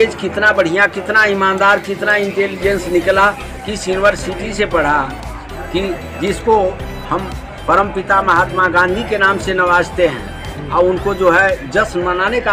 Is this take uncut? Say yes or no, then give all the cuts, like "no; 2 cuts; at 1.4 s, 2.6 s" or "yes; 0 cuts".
yes; 0 cuts